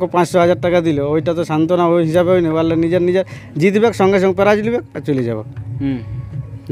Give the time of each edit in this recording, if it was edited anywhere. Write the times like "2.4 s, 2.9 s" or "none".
none